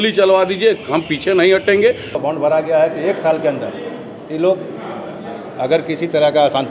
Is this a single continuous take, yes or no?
no